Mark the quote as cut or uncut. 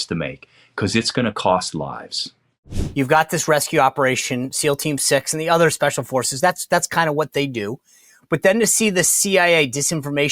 cut